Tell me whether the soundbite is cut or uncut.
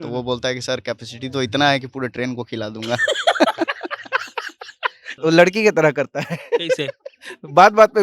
cut